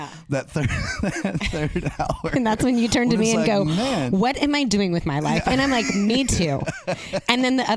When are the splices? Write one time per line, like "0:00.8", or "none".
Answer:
none